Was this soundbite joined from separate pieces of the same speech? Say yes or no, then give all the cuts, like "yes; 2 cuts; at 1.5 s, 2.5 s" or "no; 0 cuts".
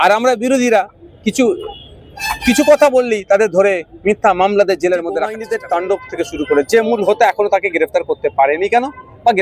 yes; 1 cut; at 5.4 s